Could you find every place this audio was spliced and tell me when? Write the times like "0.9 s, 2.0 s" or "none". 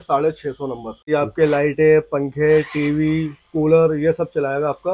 1.1 s